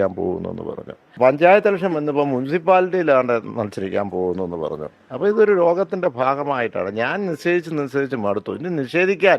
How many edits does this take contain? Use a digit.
1